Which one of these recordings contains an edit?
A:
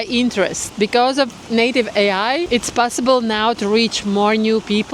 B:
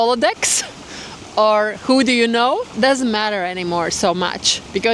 A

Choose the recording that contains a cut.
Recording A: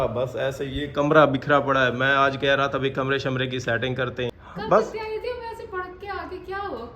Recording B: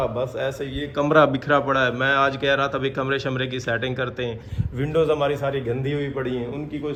A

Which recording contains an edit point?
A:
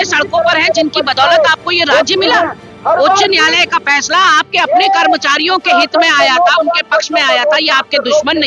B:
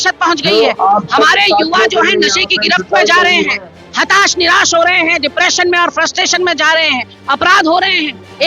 A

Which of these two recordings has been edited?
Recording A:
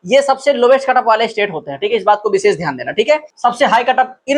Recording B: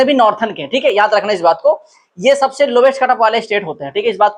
A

